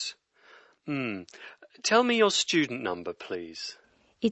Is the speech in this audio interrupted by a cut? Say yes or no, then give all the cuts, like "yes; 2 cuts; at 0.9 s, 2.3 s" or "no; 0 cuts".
no; 0 cuts